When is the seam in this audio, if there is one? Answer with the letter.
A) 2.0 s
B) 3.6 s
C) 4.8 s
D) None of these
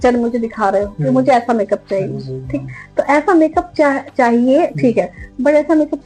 D